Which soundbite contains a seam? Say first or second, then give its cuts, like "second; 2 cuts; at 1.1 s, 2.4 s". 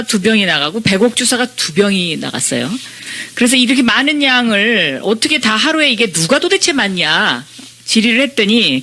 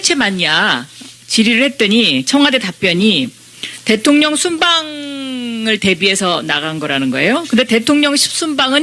second; 1 cut; at 6.3 s